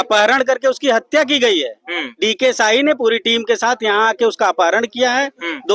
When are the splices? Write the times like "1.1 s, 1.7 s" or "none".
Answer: none